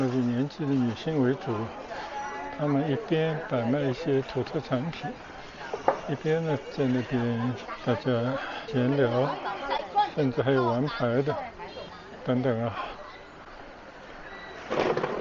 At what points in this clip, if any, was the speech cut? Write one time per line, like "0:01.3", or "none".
none